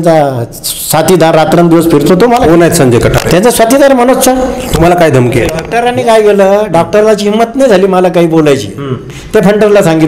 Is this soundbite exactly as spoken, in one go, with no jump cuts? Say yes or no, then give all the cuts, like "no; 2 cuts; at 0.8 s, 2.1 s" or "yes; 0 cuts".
no; 1 cut; at 5.6 s